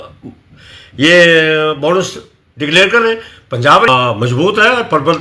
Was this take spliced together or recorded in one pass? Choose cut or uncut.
cut